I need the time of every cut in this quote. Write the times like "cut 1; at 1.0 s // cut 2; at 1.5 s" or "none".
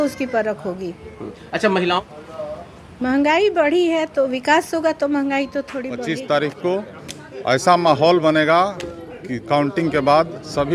cut 1; at 2.0 s // cut 2; at 5.9 s